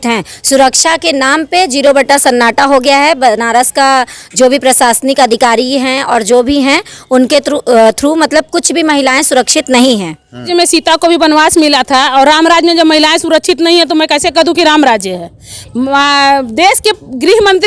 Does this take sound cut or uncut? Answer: cut